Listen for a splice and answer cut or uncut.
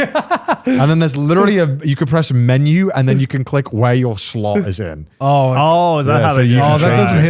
uncut